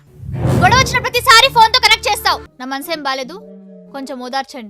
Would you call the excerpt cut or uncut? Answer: cut